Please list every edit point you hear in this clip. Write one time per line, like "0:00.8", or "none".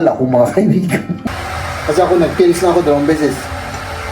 0:01.2